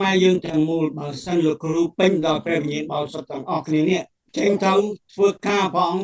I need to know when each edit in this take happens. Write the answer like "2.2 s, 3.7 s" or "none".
4.2 s